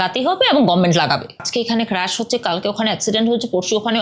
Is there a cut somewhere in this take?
yes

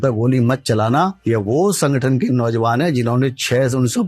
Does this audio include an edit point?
yes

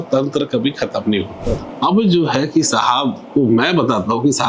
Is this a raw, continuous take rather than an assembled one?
no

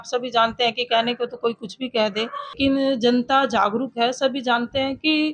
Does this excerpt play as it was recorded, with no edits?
no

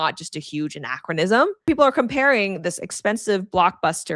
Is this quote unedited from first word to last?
no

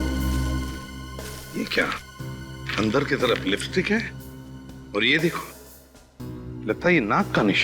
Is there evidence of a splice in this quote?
no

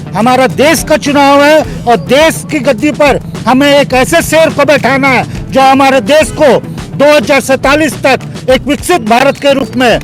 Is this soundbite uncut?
yes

